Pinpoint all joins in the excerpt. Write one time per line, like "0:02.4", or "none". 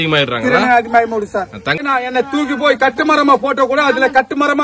0:01.8

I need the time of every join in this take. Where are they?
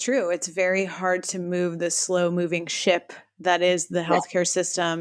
none

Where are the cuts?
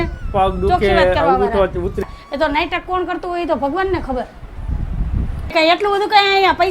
0:02.0
0:05.5

